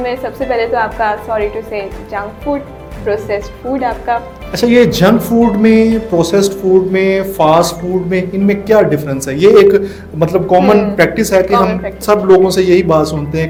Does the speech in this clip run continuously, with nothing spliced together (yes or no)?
yes